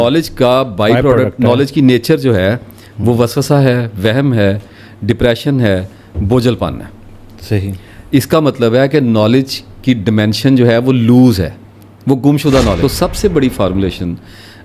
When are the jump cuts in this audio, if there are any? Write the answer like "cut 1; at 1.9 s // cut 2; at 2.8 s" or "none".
cut 1; at 12.8 s